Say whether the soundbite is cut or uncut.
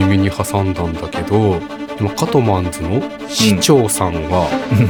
uncut